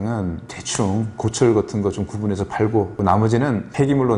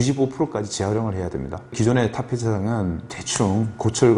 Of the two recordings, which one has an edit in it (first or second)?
first